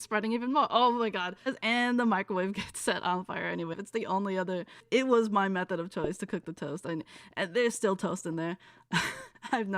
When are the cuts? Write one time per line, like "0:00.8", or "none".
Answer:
0:01.5
0:03.8
0:04.8